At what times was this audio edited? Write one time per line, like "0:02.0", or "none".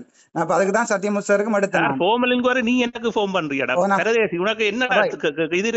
none